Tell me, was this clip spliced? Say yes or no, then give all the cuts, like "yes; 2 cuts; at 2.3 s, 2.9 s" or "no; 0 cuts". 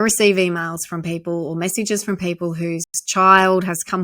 no; 0 cuts